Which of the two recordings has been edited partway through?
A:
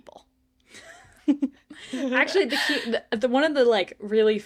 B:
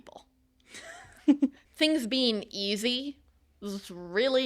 B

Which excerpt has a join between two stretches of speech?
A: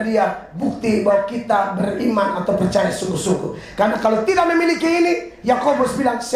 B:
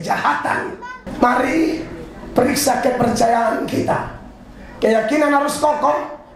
B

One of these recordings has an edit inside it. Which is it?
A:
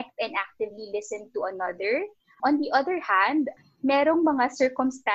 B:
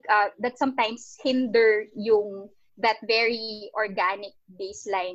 A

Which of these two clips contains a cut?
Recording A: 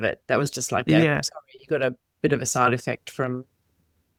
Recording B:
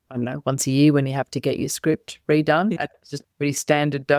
B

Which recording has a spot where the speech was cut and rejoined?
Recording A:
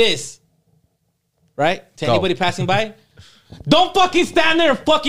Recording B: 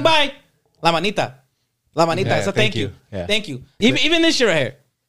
B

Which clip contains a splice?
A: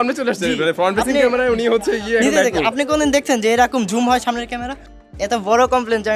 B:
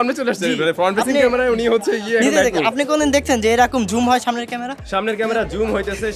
A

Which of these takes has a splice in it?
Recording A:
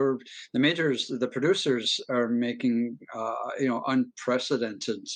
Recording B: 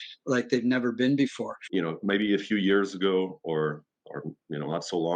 B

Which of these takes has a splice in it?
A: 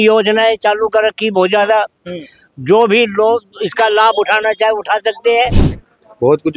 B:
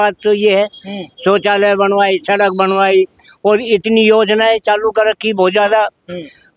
A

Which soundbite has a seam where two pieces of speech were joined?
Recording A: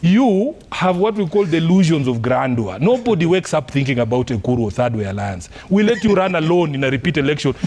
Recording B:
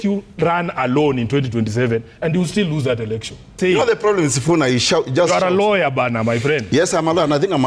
B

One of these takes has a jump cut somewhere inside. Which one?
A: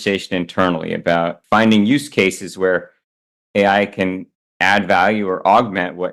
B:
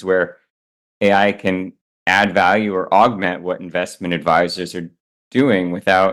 A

